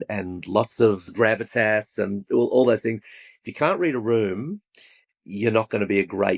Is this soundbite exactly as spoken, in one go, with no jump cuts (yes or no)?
yes